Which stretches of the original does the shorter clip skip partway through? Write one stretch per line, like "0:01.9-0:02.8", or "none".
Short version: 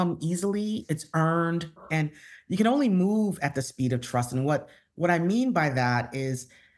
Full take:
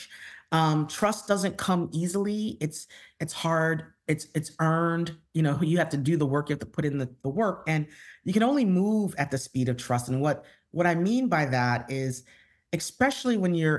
0:02.5-0:04.3
0:05.3-0:07.6